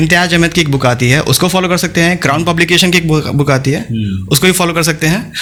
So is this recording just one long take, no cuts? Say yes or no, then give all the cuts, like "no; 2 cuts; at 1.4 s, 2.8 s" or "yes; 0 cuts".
yes; 0 cuts